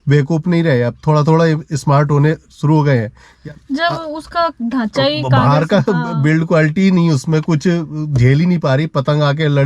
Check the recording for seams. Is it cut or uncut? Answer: cut